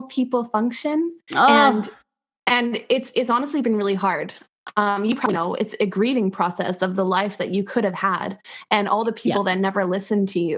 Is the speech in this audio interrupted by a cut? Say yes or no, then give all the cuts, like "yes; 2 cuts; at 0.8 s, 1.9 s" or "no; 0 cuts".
no; 0 cuts